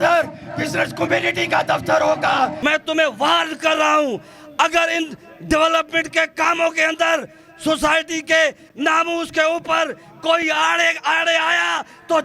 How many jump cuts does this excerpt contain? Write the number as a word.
one